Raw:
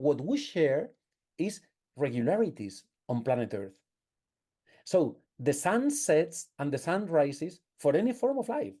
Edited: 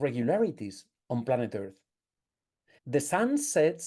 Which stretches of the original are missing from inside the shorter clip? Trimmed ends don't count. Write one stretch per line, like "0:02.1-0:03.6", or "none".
0:04.7-0:05.3